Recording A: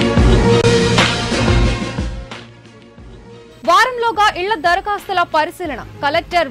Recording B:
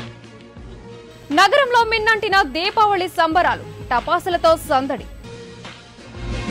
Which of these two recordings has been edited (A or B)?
B